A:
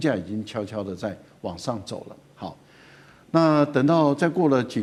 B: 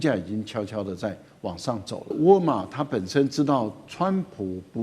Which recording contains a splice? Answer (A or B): B